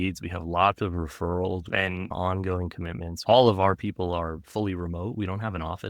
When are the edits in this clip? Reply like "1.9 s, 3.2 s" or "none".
1.8 s, 3.1 s